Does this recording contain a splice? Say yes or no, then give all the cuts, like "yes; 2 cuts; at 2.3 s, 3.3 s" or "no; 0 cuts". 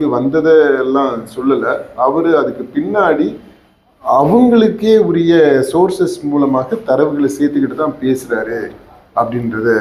no; 0 cuts